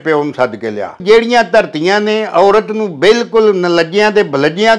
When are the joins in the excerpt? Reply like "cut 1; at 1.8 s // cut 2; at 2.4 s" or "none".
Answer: cut 1; at 1.0 s